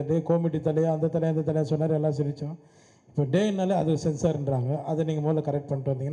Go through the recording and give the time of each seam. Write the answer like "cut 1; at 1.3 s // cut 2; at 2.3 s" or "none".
none